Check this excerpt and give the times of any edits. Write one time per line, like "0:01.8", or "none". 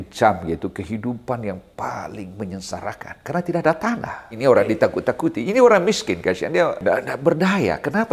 0:04.3
0:06.8